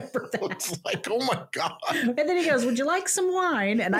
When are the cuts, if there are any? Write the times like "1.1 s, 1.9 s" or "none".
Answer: none